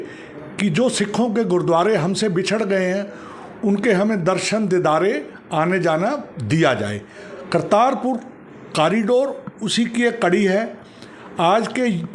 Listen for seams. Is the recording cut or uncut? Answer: uncut